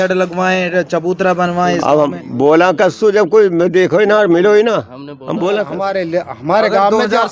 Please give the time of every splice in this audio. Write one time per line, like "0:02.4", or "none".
0:05.8